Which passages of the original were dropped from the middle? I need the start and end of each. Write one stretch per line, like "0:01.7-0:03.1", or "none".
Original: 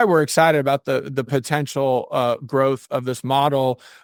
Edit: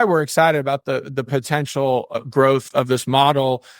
0:02.1-0:02.3